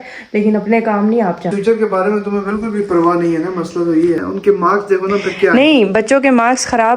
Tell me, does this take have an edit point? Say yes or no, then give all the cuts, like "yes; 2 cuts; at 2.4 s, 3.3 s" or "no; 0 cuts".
yes; 2 cuts; at 1.5 s, 4.2 s